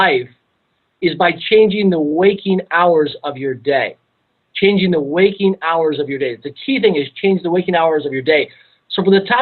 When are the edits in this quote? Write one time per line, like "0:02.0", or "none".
0:04.9